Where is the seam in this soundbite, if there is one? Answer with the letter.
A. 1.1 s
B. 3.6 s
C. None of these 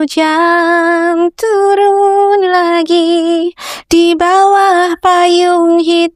C